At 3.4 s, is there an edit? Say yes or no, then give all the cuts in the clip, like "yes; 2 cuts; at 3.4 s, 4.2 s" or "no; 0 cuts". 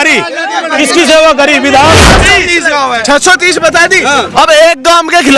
no; 1 cut; at 2.0 s